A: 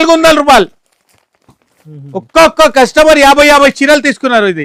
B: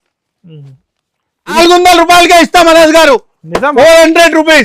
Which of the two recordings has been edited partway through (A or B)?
B